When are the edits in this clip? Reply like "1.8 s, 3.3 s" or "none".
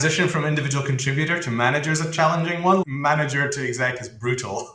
2.8 s